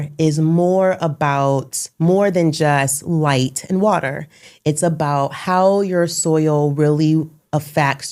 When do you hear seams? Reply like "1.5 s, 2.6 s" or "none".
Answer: none